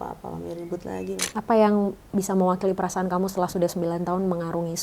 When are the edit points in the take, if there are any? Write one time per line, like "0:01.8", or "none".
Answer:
0:01.3